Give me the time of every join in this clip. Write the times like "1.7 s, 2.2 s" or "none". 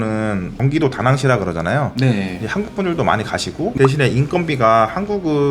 3.7 s